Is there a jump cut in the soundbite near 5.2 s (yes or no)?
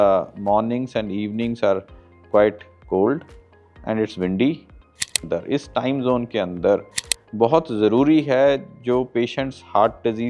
yes